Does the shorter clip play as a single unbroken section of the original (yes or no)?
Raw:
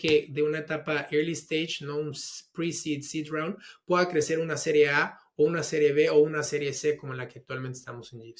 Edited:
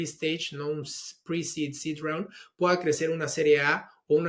yes